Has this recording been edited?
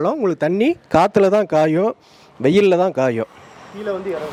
no; 0 cuts

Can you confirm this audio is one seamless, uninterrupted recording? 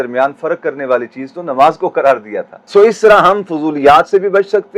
no; 1 cut; at 2.6 s

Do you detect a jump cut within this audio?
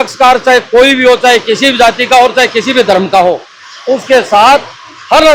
no; 0 cuts

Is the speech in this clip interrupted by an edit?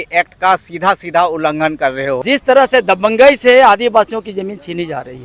yes; 1 cut; at 2.2 s

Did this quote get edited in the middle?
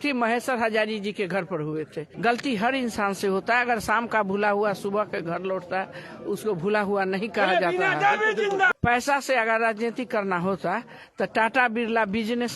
yes; 2 cuts; at 2.0 s, 8.7 s

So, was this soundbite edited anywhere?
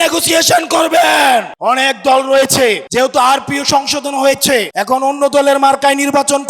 yes; 3 cuts; at 1.5 s, 2.8 s, 4.7 s

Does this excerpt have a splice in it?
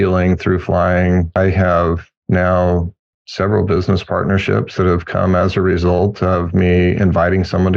yes; 1 cut; at 1.4 s

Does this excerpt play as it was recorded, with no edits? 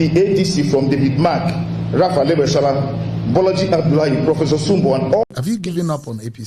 no; 1 cut; at 5.2 s

